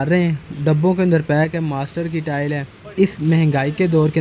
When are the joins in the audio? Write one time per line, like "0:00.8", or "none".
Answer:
0:02.8